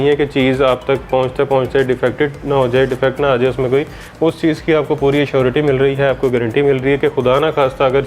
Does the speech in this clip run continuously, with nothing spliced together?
yes; 0 cuts

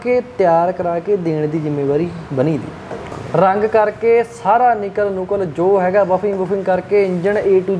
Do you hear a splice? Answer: yes; 1 cut; at 3.2 s

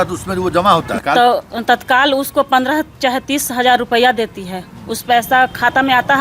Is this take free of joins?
no; 1 cut; at 0.9 s

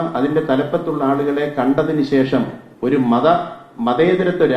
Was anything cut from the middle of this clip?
yes; 1 cut; at 2.6 s

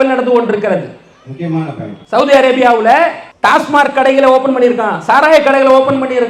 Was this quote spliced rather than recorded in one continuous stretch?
yes; 2 cuts; at 1.9 s, 3.3 s

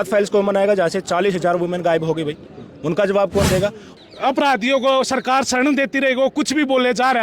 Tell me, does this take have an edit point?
yes; 1 cut; at 3.9 s

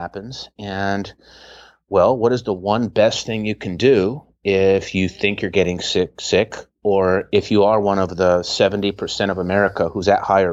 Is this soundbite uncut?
yes; 0 cuts

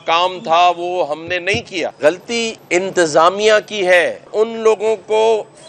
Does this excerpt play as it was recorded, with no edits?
no; 3 cuts; at 1.9 s, 2.6 s, 4.3 s

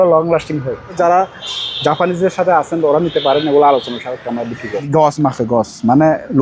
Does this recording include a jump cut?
yes; 2 cuts; at 1.0 s, 4.7 s

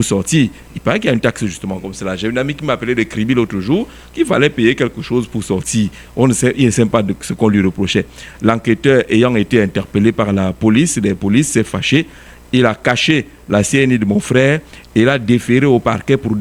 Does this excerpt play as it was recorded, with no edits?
yes; 0 cuts

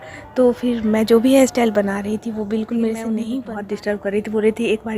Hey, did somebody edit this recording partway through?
yes; 1 cut; at 3.3 s

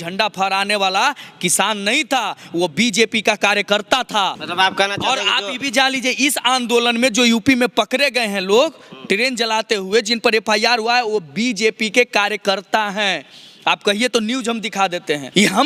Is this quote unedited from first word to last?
yes; 0 cuts

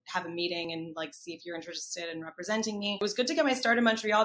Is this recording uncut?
no; 1 cut; at 3.0 s

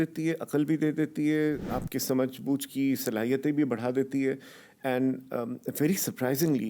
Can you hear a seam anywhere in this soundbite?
yes; 1 cut; at 1.6 s

